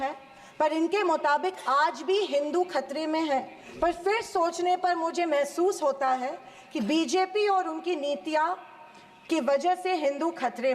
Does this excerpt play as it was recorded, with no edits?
no; 1 cut; at 3.6 s

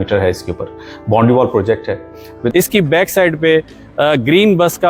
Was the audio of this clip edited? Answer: yes; 1 cut; at 2.4 s

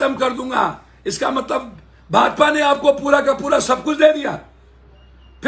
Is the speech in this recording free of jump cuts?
yes; 0 cuts

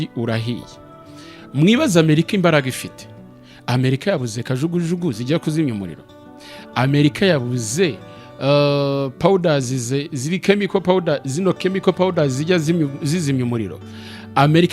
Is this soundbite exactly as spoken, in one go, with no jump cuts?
yes; 0 cuts

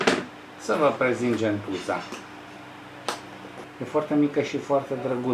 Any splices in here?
yes; 1 cut; at 3.6 s

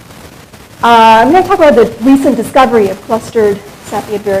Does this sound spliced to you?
no; 0 cuts

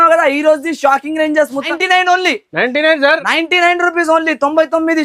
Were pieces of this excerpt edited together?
yes; 1 cut; at 1.6 s

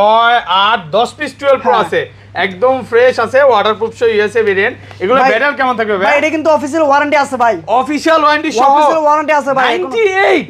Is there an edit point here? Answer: no; 0 cuts

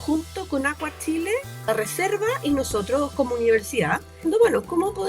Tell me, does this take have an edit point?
yes; 2 cuts; at 1.7 s, 4.2 s

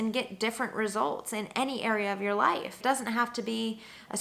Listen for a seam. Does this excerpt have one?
yes; 1 cut; at 2.8 s

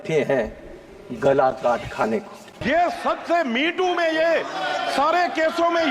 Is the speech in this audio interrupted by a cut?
yes; 1 cut; at 2.5 s

